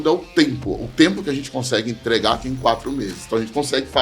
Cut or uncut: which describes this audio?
uncut